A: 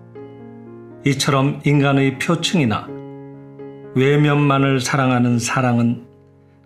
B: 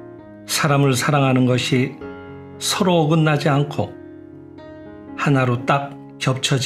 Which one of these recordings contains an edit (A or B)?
A